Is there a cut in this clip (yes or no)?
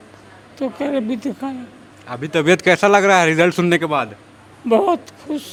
no